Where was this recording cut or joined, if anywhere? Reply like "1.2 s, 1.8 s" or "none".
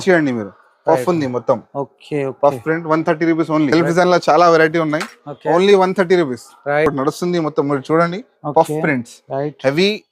3.7 s, 6.9 s